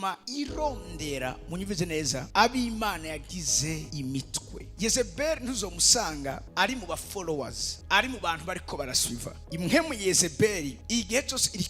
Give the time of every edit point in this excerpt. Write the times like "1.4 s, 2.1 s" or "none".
none